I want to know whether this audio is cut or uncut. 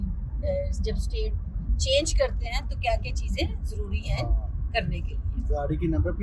uncut